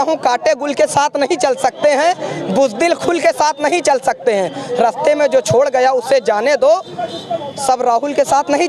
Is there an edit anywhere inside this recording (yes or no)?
no